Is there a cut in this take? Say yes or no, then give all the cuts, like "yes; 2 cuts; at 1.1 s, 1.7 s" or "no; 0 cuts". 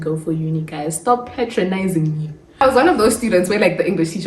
yes; 1 cut; at 2.6 s